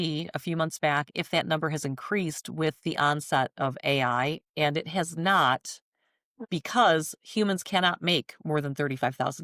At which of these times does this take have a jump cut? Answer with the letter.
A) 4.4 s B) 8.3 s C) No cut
C